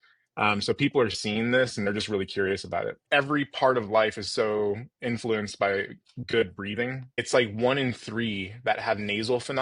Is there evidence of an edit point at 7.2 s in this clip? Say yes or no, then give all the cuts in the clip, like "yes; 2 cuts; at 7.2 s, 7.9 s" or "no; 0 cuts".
yes; 2 cuts; at 3.0 s, 7.2 s